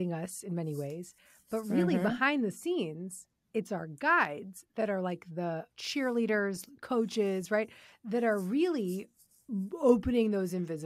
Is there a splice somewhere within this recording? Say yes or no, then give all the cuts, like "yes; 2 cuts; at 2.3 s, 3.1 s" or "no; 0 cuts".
yes; 1 cut; at 5.8 s